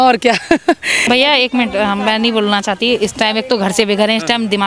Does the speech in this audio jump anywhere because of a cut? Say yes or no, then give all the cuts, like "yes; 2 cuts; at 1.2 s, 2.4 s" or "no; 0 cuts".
yes; 1 cut; at 1.0 s